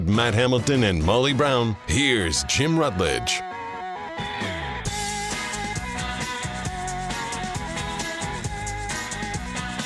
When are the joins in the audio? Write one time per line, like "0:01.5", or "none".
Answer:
none